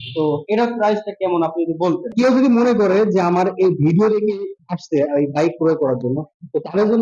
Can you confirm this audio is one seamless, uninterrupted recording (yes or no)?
no